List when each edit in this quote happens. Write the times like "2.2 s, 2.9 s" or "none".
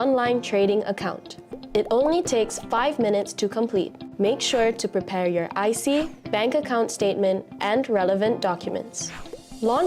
5.2 s